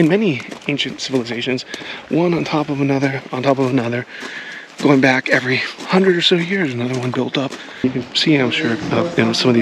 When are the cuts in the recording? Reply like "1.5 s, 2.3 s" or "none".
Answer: 7.8 s